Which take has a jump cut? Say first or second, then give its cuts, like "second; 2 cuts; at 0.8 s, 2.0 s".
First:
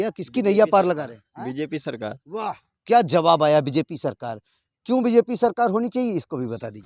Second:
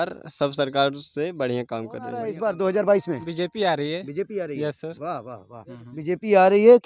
second; 1 cut; at 2.3 s